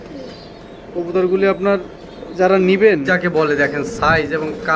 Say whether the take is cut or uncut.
cut